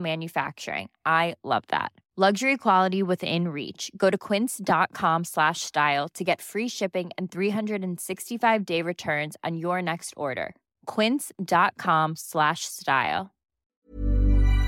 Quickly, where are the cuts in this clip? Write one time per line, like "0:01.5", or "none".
0:13.8